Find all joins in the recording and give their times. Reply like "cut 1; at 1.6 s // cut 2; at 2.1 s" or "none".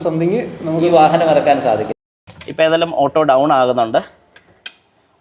cut 1; at 2.0 s